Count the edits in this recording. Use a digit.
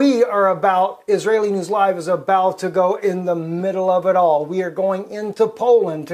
1